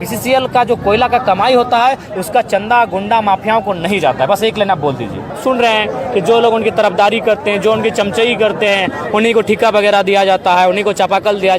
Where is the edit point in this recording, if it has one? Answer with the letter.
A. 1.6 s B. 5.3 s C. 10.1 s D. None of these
B